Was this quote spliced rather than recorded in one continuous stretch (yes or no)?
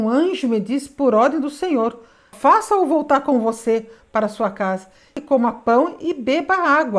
yes